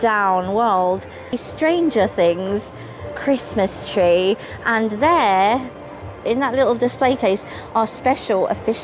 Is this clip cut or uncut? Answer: cut